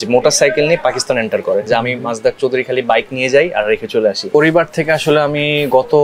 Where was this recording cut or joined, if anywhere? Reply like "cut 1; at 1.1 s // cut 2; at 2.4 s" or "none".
cut 1; at 1.6 s // cut 2; at 4.2 s